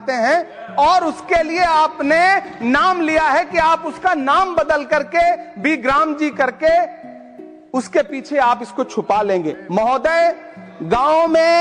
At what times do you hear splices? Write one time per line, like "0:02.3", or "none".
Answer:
0:09.6